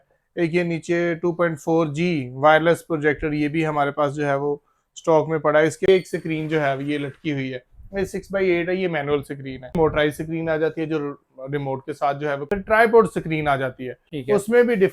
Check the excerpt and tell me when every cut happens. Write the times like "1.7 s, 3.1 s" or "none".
5.9 s, 9.7 s, 12.5 s